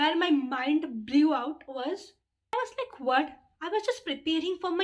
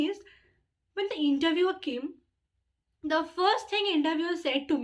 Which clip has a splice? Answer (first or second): first